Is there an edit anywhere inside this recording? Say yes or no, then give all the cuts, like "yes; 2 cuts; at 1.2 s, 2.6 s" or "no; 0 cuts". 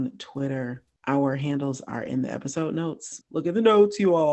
yes; 1 cut; at 3.1 s